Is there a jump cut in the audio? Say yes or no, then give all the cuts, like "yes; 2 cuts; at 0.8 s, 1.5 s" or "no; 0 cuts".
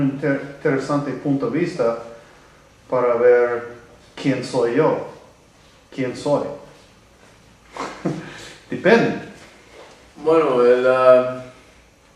no; 0 cuts